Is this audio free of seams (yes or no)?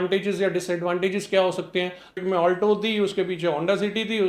no